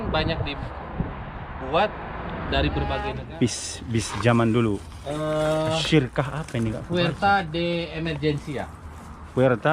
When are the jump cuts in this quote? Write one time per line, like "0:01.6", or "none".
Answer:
0:03.1

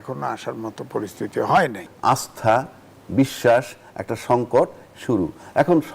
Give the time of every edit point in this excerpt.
0:01.9

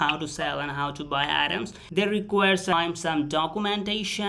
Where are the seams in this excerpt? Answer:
0:01.8

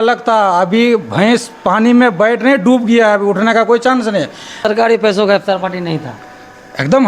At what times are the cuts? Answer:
0:04.6

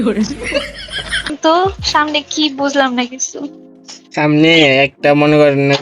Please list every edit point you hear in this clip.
0:01.3

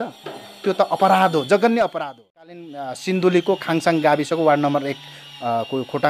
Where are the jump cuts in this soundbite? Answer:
0:02.8

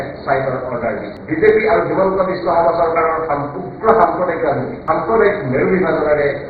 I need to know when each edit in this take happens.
0:01.1
0:04.7

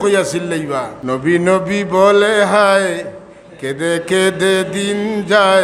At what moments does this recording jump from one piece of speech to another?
0:00.9

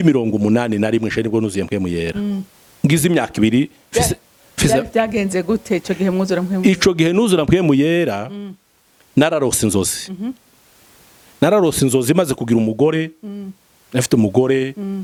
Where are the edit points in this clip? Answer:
none

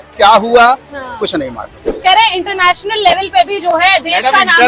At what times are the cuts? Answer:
0:01.9

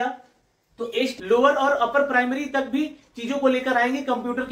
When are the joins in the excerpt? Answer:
0:01.2

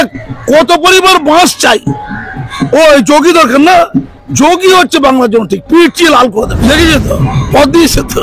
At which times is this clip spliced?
0:06.5

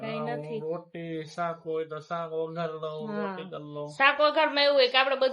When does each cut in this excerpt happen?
none

